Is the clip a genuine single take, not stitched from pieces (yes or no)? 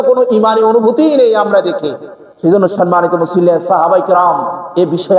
yes